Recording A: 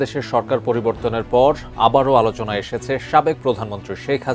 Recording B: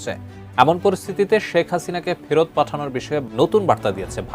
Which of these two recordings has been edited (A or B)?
B